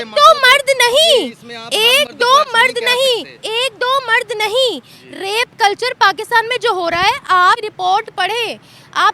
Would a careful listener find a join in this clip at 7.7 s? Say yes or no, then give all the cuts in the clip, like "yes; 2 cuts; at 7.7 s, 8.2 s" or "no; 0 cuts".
yes; 1 cut; at 7.7 s